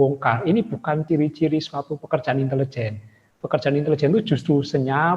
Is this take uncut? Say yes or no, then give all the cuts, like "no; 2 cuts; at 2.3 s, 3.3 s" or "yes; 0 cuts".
no; 1 cut; at 1.0 s